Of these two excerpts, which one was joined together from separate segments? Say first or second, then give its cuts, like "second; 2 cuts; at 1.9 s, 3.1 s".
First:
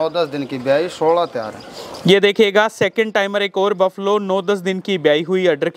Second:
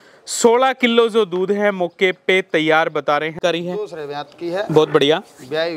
second; 1 cut; at 3.4 s